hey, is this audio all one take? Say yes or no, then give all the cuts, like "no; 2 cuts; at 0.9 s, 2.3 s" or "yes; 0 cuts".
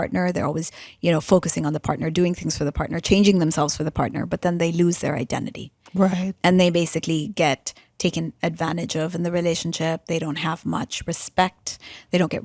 yes; 0 cuts